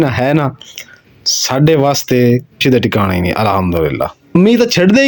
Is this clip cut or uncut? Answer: cut